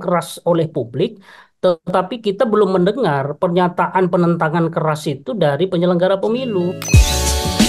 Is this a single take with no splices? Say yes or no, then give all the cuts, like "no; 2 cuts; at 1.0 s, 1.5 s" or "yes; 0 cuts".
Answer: no; 1 cut; at 6.8 s